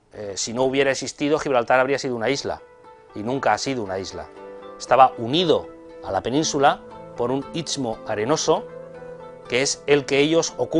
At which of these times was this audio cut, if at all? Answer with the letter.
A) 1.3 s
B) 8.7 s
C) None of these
A